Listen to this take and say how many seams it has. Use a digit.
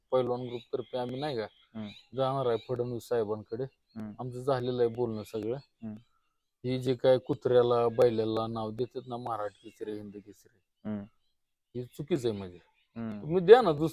0